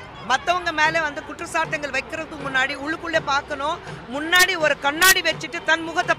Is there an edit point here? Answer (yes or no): no